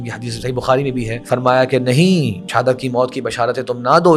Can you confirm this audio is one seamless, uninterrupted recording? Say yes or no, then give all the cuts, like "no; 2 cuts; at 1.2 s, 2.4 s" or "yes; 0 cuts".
no; 2 cuts; at 1.2 s, 2.4 s